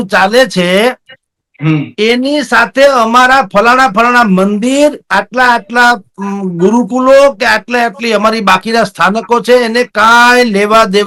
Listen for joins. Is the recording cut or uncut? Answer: uncut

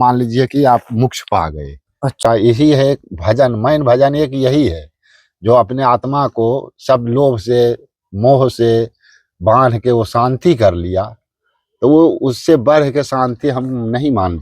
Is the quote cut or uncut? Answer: cut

